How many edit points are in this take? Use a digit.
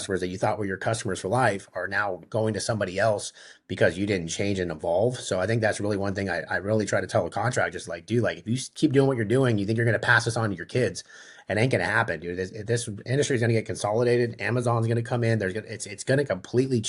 0